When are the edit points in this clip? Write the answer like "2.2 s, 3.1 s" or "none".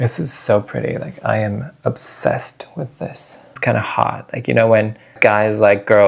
3.6 s, 5.2 s